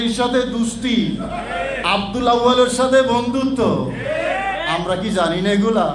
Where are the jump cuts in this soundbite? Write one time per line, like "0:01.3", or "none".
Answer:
0:01.6
0:04.6